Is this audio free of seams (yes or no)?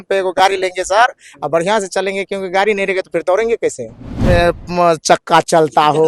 no